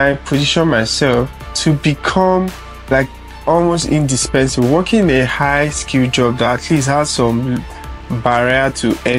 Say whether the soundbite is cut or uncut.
uncut